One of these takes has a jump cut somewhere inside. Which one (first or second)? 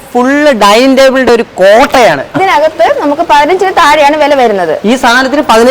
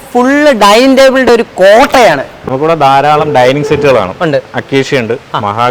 first